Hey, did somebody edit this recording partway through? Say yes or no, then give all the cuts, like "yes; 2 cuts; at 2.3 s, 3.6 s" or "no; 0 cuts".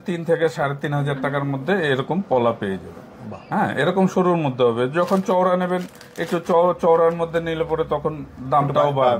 no; 0 cuts